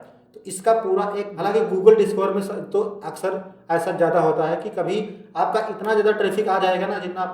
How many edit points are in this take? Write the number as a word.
one